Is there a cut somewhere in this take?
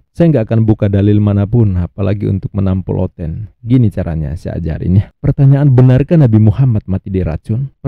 no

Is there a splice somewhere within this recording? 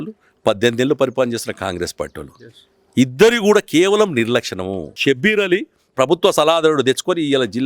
yes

